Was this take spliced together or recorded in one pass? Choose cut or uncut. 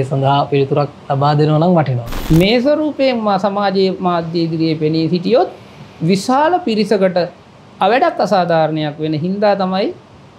cut